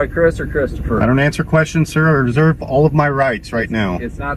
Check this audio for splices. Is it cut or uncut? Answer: uncut